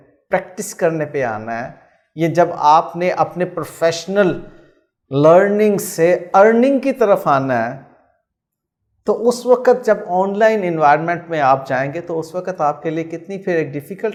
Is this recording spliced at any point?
no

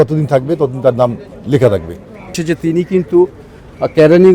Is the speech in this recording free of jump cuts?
no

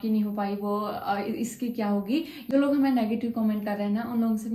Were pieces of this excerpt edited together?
no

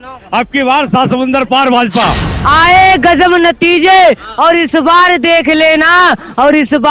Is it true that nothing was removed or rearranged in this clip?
no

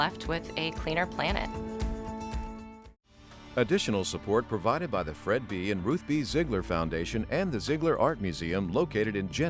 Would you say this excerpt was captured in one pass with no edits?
no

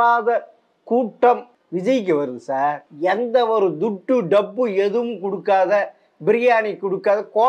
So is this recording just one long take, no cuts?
no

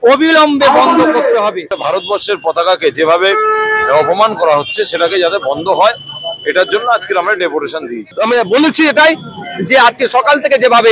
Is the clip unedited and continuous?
no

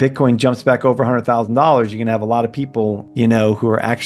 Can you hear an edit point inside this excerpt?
yes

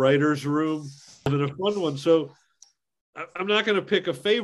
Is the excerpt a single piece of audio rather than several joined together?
no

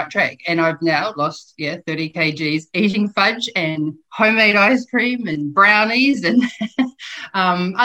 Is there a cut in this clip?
no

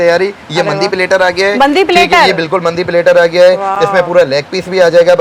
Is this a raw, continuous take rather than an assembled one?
yes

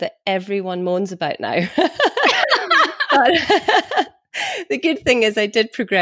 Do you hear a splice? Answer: no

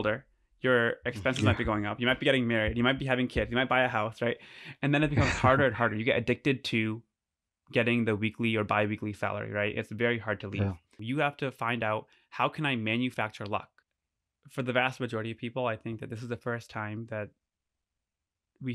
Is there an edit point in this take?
yes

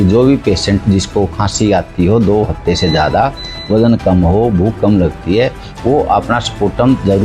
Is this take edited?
no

